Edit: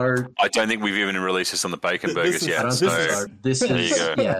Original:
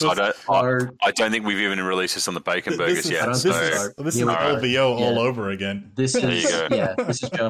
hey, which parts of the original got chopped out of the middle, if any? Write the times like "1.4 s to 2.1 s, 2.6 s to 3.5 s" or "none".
3.9 s to 5.8 s